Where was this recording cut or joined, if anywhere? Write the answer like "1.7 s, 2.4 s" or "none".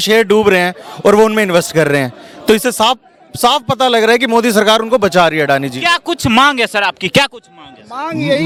none